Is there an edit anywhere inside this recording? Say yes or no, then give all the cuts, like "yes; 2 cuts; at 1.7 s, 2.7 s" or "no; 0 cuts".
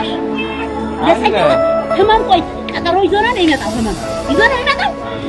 no; 0 cuts